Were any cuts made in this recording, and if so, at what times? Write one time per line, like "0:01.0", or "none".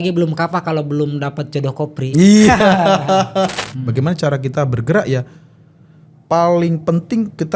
0:03.6